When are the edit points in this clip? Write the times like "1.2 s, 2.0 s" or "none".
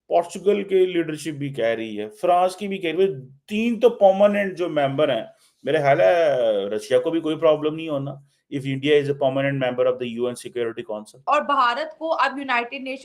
11.2 s